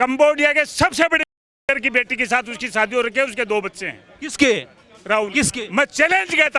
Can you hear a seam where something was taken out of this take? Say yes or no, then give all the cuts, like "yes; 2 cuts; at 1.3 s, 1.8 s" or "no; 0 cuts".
no; 0 cuts